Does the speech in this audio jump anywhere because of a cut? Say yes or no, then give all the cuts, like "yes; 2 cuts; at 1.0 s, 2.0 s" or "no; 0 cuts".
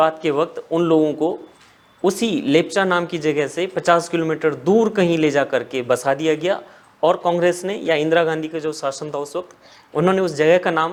no; 0 cuts